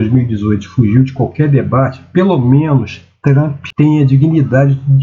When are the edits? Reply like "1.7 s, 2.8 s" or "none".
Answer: 3.6 s

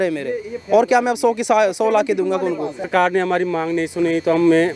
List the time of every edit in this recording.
2.9 s

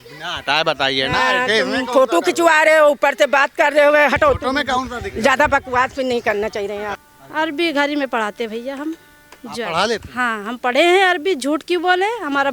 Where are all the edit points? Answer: 7.0 s

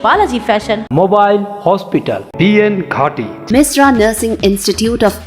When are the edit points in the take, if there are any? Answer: none

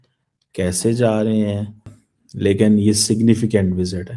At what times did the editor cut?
1.9 s

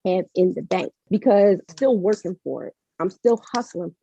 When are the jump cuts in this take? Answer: 1.0 s, 1.7 s

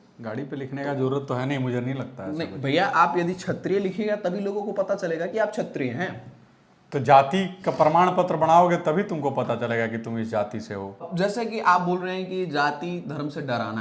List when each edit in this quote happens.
11.0 s

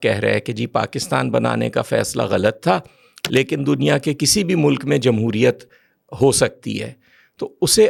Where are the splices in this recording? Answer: none

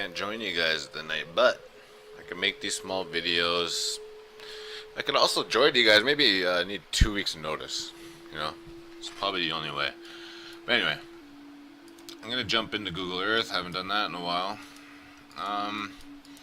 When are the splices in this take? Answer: 11.1 s

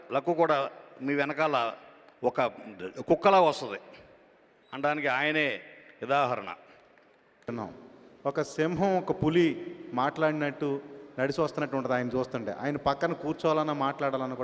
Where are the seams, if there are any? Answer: 7.5 s

